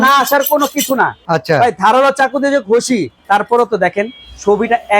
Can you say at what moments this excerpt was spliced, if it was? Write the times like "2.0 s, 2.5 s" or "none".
1.2 s, 3.1 s